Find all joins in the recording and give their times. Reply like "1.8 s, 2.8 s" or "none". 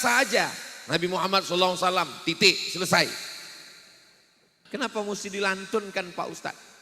4.5 s